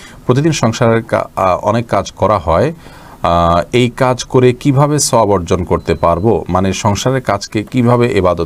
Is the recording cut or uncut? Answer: uncut